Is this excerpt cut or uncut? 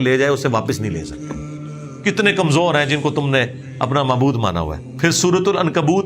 cut